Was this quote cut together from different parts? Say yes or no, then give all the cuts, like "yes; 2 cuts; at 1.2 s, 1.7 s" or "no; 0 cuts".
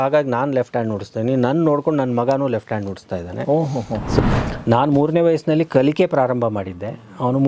yes; 1 cut; at 4.2 s